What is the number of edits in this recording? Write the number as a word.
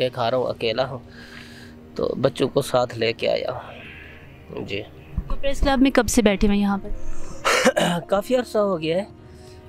zero